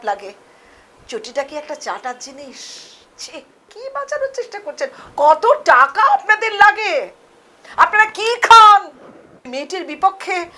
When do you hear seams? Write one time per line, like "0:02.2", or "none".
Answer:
0:03.7
0:09.5